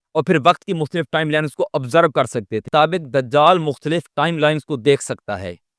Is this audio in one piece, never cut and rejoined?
no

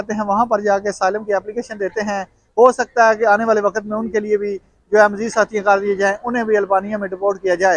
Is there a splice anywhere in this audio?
no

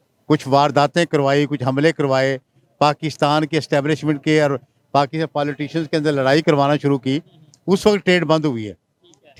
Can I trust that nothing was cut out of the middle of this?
yes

